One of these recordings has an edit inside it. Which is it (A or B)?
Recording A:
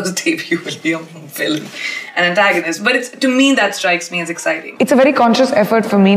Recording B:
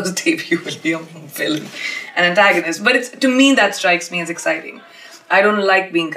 A